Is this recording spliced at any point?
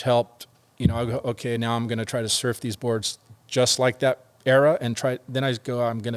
no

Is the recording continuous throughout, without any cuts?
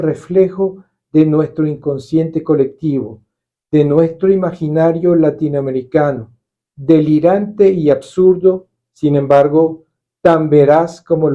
yes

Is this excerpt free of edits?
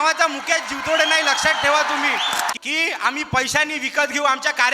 no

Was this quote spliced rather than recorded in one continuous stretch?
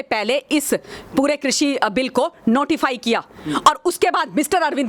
no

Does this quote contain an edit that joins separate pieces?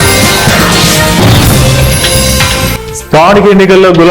yes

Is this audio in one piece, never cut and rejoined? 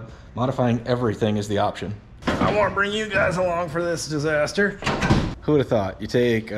no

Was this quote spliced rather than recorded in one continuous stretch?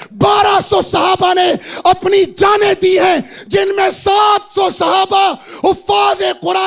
no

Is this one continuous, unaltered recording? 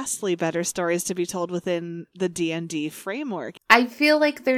no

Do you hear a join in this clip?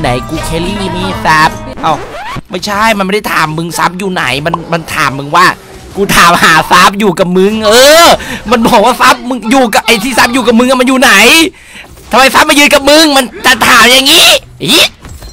no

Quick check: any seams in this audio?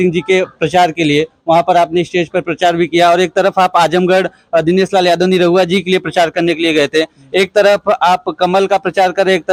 no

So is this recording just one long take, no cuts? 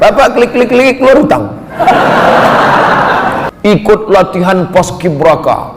no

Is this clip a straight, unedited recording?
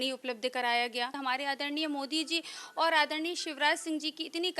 no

